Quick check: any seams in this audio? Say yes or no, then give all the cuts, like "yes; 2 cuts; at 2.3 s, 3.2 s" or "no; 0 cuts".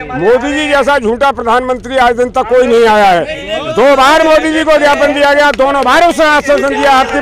no; 0 cuts